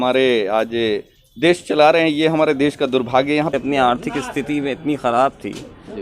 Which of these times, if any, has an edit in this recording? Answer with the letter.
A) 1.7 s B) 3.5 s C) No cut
B